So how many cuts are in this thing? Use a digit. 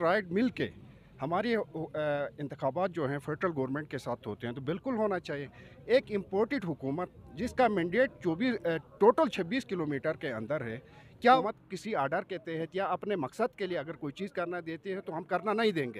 1